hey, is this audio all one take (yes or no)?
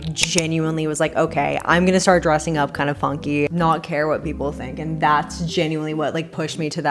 yes